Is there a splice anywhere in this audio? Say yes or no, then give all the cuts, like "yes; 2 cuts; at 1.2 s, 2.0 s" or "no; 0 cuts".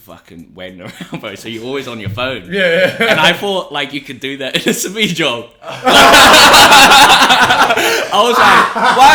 no; 0 cuts